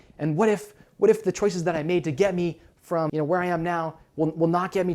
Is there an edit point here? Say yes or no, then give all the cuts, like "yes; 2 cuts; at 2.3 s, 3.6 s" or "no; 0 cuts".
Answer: yes; 1 cut; at 3.1 s